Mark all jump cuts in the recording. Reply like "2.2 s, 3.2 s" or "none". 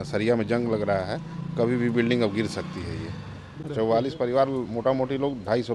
3.6 s

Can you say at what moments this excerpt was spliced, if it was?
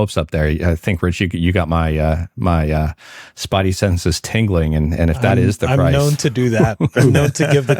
none

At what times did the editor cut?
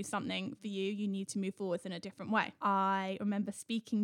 2.5 s

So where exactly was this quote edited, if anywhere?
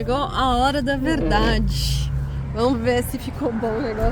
none

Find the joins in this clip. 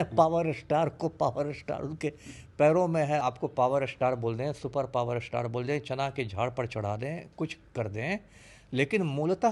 3.2 s

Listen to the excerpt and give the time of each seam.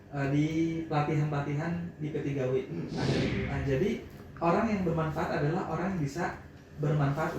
3.3 s

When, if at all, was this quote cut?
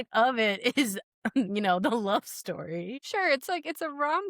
3.0 s

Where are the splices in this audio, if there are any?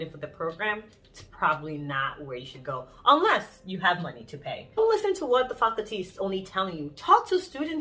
4.8 s

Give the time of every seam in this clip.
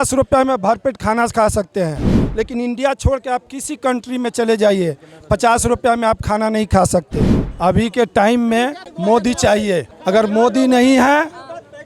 7.4 s, 8.9 s, 9.9 s

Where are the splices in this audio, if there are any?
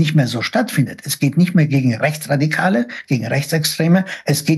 none

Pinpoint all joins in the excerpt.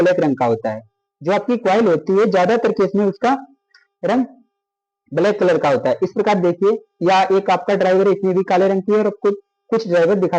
none

